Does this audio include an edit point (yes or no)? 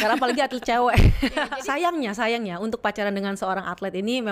yes